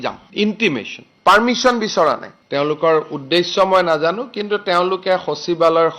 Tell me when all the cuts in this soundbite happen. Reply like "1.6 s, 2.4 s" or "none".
2.3 s